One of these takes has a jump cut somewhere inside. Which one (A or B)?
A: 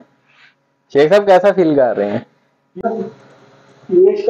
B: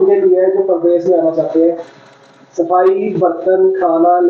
A